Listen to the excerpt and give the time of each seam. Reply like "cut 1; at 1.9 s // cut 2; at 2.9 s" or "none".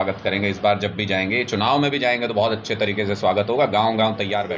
none